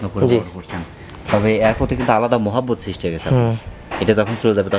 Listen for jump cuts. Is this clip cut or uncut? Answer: uncut